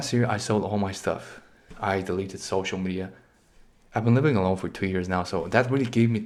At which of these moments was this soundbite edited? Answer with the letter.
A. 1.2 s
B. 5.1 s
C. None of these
C